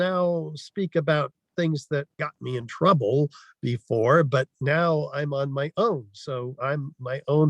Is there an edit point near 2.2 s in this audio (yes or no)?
yes